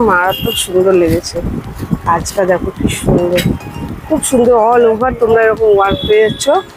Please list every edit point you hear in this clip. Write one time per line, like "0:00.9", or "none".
none

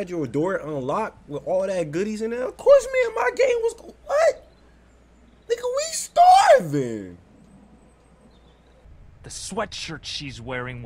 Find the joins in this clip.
0:08.9

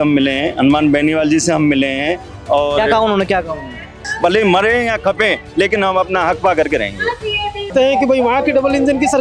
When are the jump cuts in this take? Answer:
0:04.0
0:07.7

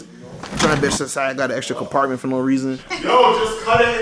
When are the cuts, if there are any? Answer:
0:02.8

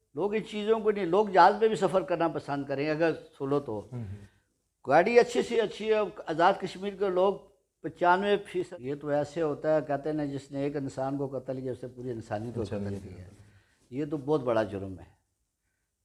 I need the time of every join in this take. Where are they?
0:08.7

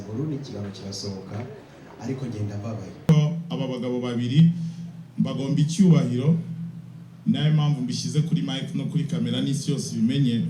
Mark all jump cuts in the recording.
0:03.1

